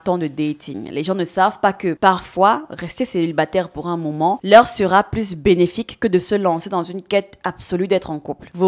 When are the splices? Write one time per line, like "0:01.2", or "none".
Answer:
0:02.0